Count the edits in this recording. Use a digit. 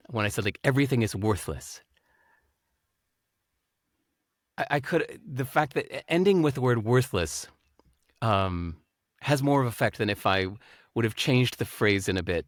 0